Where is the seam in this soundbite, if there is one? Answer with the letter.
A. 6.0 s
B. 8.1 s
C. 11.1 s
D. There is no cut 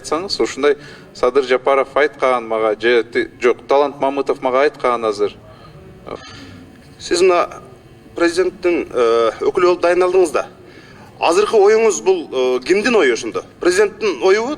A